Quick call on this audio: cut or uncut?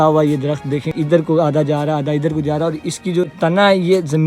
cut